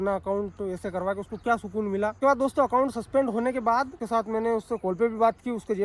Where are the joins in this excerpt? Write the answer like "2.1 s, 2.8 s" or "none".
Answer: 2.2 s, 4.0 s